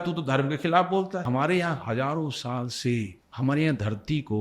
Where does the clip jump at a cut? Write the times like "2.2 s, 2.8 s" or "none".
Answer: 1.2 s, 3.2 s